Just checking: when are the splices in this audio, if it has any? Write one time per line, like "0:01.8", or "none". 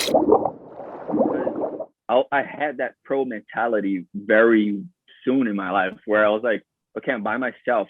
0:01.6